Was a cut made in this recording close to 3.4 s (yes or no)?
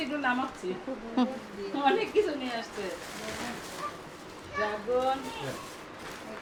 no